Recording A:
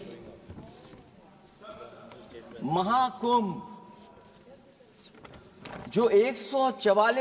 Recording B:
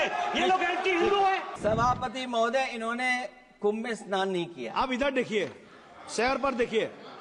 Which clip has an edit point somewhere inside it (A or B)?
B